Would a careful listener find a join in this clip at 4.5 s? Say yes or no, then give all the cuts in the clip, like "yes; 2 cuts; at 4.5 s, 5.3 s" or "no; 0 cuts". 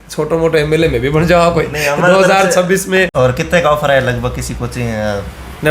no; 1 cut; at 3.1 s